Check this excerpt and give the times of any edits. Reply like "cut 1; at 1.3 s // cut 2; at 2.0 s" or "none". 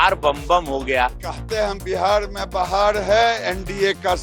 cut 1; at 1.1 s